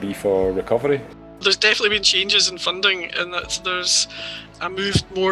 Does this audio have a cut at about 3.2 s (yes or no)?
no